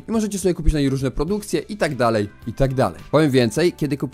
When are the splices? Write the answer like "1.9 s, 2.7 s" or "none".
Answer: 2.6 s

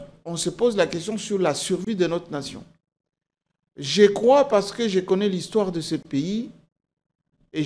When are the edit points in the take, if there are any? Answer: none

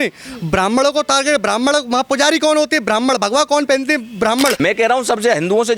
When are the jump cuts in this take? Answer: 4.6 s

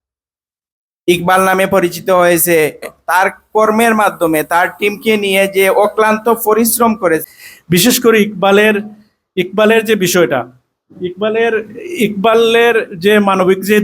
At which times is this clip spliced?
3.0 s, 7.2 s

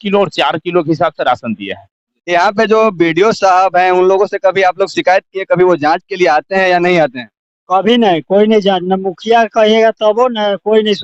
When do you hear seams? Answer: 2.1 s

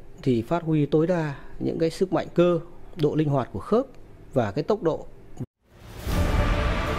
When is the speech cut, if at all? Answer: none

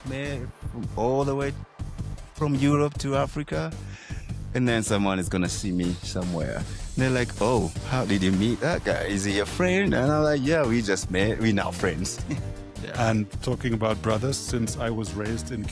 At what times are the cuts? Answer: 12.3 s

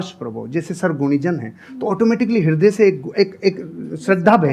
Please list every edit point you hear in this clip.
none

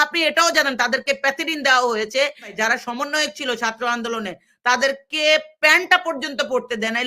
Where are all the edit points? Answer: 2.5 s

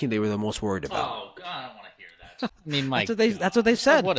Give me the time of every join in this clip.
2.5 s

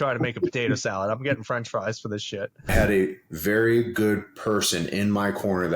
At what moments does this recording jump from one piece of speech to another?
2.7 s

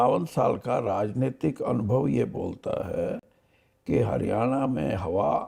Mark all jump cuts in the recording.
none

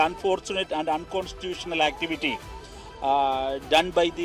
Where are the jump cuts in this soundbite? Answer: none

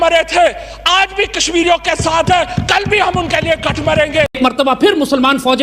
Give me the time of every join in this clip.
4.4 s

